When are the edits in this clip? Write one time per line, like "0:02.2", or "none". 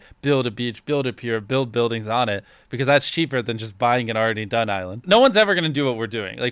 0:05.0